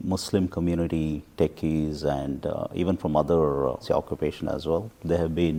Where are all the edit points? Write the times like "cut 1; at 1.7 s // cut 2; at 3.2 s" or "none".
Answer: none